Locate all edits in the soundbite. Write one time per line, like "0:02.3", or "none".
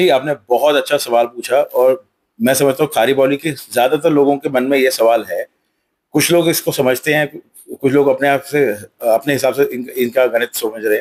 none